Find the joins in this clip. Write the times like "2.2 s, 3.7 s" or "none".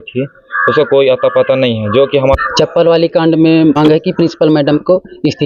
2.3 s, 3.8 s